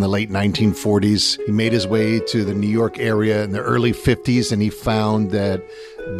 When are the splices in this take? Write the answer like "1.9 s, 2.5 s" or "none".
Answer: 1.3 s